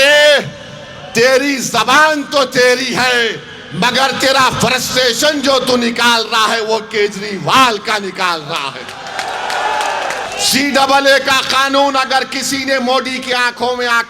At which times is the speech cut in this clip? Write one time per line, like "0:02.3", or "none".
0:10.3

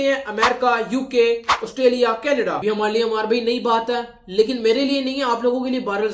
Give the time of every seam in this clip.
0:02.6

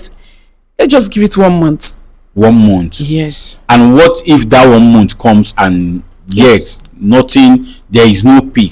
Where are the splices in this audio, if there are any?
none

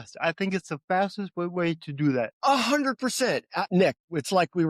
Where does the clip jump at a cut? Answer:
0:02.3
0:03.6

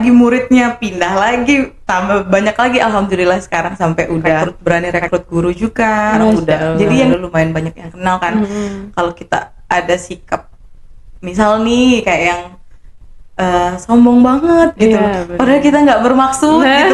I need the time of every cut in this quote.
0:04.5
0:07.1

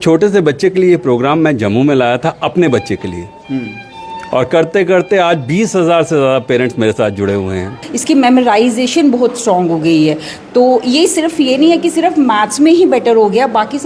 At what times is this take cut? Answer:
0:07.9

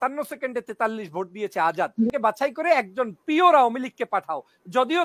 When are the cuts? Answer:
0:02.1

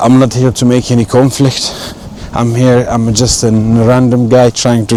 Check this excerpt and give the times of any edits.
none

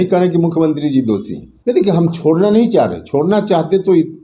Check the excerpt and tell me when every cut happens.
0:01.6

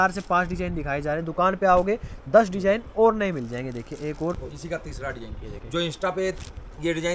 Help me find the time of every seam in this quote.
0:04.4

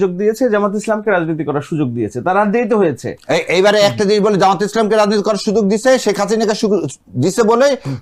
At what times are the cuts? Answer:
none

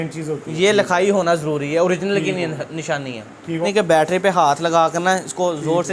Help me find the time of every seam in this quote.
0:03.6

